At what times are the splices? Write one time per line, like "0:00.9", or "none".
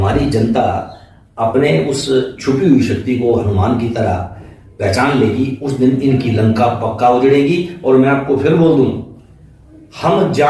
none